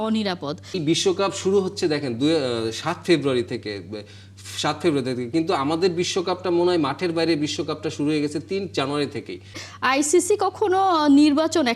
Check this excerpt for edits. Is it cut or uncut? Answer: cut